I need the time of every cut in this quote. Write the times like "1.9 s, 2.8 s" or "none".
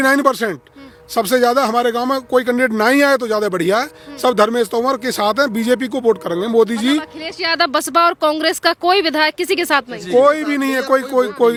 none

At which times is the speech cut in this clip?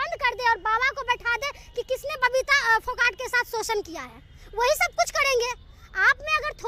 none

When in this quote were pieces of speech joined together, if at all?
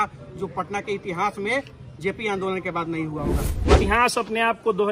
3.7 s

